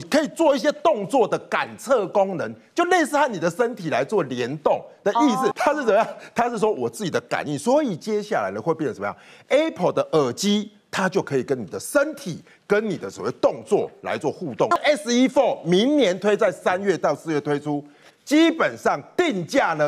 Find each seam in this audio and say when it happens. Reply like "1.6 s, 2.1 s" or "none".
5.5 s, 14.8 s